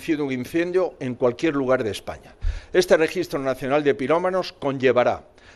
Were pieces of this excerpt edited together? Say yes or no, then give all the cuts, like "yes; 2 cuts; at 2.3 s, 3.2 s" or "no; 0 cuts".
no; 0 cuts